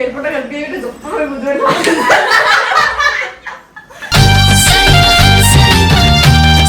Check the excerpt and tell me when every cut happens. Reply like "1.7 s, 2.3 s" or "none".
none